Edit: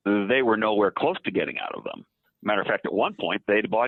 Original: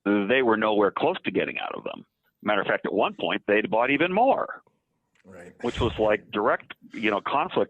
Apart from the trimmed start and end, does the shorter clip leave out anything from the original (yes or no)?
no